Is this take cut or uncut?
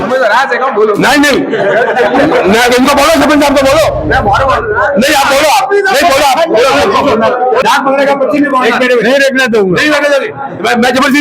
cut